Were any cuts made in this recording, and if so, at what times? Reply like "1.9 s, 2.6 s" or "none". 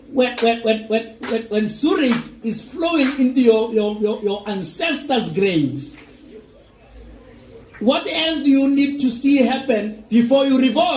none